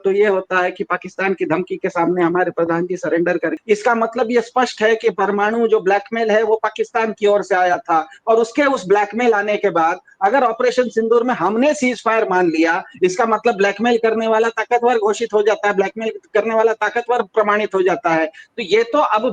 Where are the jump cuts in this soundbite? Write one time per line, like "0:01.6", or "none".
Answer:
0:03.5